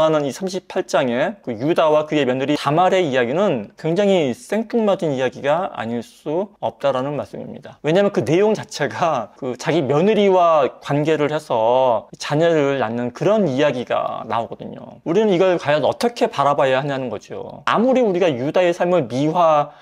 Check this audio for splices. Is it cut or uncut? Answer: cut